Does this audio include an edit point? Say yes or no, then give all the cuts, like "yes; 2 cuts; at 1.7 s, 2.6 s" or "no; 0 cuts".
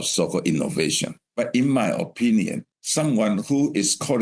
yes; 2 cuts; at 1.2 s, 2.6 s